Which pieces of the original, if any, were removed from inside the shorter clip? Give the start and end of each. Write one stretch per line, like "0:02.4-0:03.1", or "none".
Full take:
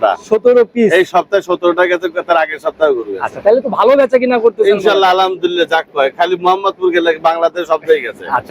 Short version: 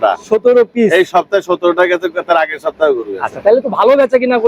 none

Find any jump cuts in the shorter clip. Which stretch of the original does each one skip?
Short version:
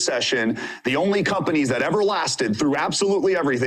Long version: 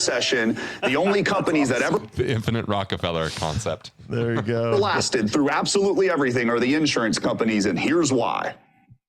0:02.0-0:04.7

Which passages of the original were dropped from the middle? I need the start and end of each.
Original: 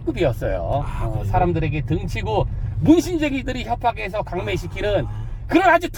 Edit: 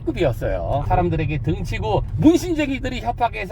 0:00.8-0:01.3
0:02.5-0:02.7

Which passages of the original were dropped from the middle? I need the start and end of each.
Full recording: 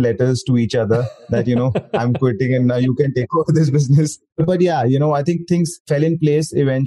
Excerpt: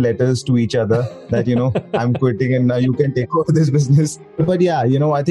none

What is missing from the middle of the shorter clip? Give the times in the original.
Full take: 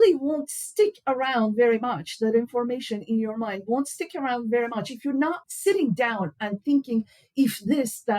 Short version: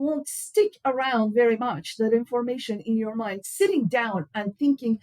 0:03.6-0:05.4

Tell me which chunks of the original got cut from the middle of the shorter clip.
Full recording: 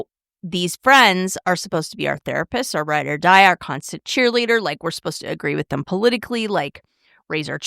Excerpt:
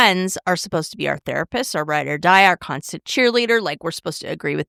none

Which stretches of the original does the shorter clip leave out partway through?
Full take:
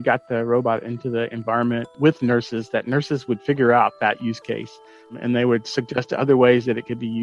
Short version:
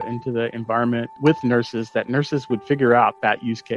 none

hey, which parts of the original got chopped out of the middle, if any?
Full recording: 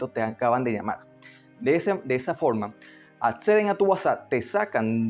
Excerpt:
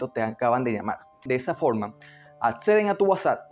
0:01.2-0:02.0

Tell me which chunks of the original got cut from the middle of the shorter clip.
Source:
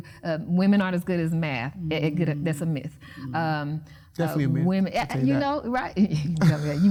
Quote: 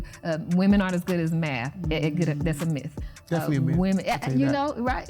0:03.1-0:04.0

